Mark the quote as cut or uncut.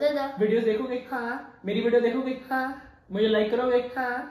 uncut